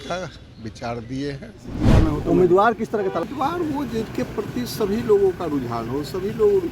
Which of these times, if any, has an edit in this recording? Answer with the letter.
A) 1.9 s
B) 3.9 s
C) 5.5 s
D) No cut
A